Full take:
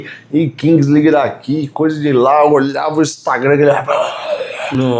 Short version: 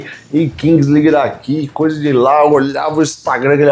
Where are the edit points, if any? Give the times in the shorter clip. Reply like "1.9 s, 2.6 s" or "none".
none